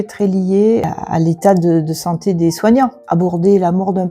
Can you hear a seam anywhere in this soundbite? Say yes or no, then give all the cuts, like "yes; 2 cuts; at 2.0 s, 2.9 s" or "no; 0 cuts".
yes; 2 cuts; at 0.9 s, 3.0 s